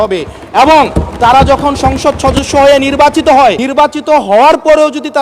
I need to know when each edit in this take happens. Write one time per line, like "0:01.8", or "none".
0:03.6